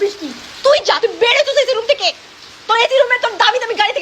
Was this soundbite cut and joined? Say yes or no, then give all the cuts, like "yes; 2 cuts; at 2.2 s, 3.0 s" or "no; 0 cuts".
no; 0 cuts